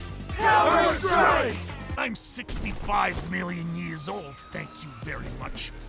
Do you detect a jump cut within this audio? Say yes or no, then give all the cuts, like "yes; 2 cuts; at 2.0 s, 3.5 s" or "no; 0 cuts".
yes; 1 cut; at 1.8 s